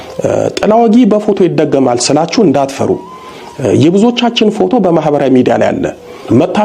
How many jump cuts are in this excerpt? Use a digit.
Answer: 1